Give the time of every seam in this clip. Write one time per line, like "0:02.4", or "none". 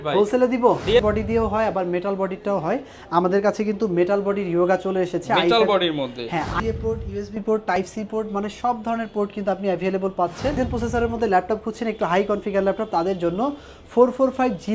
0:01.0
0:06.5
0:10.6